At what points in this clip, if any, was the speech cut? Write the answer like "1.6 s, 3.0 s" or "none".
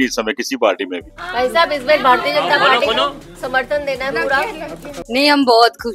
1.2 s, 5.1 s